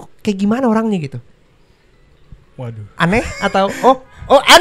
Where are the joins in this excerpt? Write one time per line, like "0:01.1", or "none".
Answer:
none